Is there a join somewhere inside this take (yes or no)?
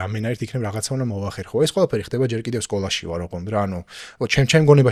no